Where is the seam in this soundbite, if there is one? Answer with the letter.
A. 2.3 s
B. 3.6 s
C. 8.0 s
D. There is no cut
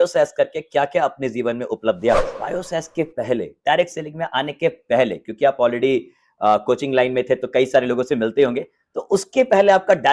A